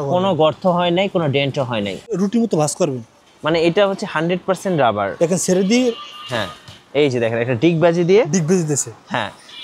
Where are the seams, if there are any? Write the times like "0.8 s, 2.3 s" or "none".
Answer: 2.2 s